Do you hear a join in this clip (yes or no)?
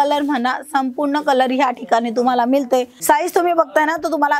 yes